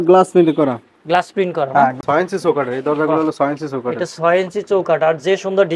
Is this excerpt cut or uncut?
cut